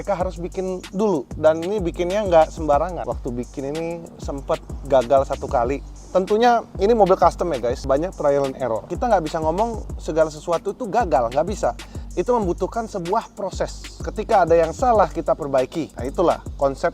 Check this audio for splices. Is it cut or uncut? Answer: cut